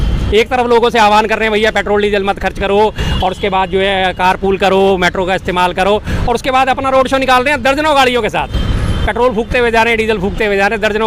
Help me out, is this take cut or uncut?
uncut